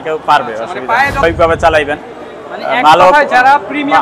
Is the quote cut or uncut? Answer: cut